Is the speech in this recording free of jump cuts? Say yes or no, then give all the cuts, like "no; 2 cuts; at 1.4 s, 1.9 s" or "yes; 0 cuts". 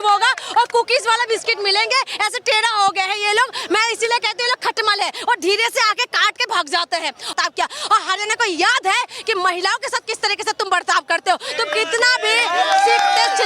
no; 1 cut; at 7.3 s